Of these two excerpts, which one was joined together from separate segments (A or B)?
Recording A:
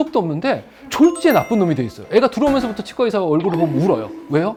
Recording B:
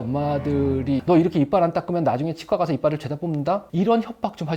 B